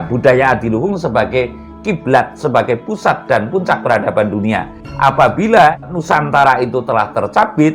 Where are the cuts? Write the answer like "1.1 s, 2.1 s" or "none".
4.8 s, 5.8 s